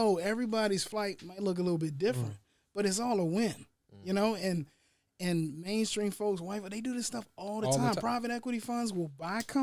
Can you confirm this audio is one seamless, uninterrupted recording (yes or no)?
yes